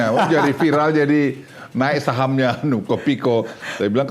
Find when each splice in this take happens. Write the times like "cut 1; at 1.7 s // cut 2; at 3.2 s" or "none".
none

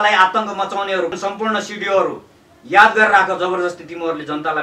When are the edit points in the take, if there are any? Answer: cut 1; at 1.1 s

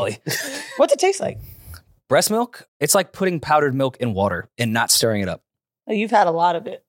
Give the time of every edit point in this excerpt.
cut 1; at 2.6 s

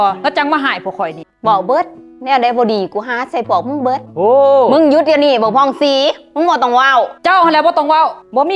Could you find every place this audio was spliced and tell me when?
cut 1; at 1.3 s

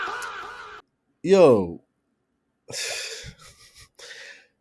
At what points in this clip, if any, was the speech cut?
none

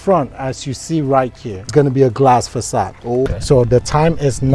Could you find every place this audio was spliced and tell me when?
cut 1; at 1.7 s // cut 2; at 3.3 s

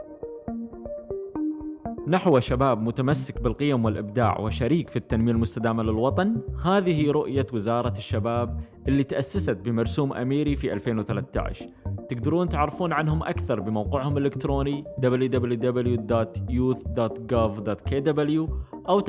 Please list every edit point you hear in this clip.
cut 1; at 2.0 s

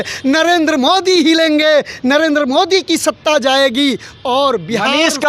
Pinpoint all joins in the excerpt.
none

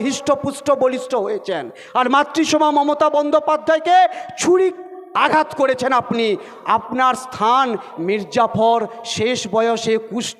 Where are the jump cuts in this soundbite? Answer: cut 1; at 7.9 s

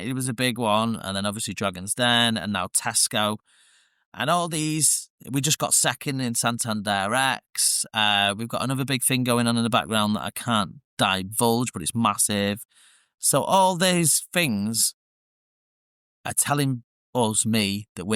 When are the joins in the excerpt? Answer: none

